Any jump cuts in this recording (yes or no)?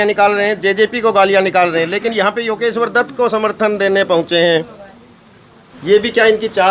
no